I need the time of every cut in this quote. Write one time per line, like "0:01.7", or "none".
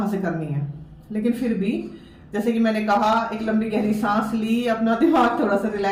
none